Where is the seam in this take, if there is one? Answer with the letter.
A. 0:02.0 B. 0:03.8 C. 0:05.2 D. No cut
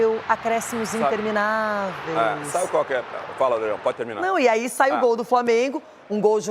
D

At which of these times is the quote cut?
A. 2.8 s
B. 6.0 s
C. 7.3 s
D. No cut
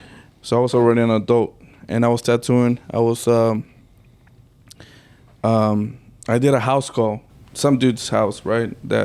C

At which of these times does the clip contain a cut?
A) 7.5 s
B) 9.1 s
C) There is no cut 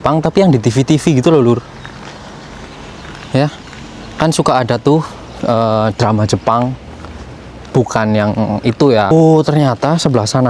B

